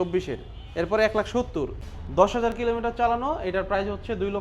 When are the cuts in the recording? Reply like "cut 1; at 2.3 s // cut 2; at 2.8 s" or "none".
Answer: cut 1; at 1.8 s